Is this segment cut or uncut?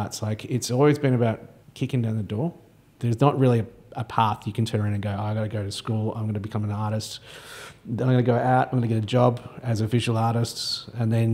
cut